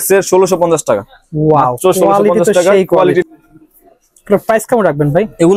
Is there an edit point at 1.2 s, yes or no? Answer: no